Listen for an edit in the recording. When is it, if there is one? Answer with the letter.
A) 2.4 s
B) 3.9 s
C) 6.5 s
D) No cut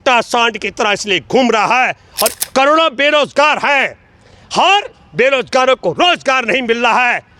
A